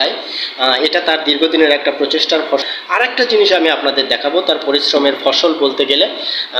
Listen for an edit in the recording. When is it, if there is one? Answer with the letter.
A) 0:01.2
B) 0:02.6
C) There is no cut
B